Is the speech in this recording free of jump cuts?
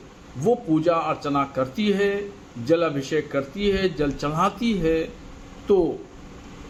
yes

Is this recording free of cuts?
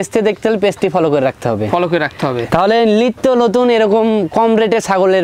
yes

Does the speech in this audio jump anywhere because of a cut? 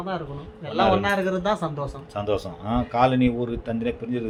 no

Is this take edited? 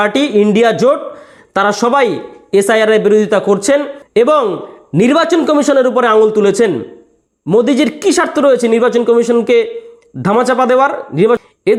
no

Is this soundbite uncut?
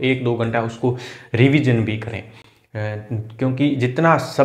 yes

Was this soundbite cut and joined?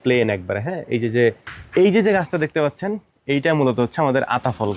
yes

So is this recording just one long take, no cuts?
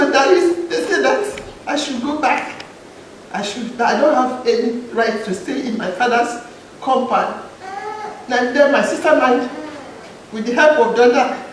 no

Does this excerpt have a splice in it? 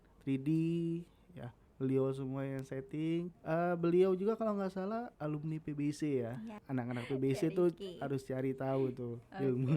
yes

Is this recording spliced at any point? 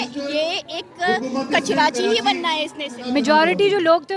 yes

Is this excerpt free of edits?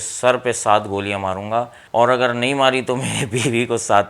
no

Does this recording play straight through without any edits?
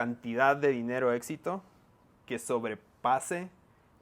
yes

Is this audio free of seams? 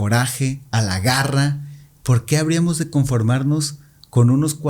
yes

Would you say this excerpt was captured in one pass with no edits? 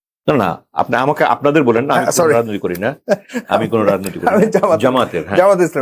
yes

